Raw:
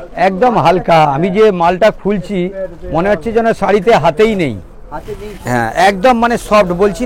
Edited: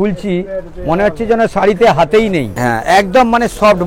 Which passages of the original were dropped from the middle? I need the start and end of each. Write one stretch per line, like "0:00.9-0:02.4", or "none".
0:04.6-0:05.4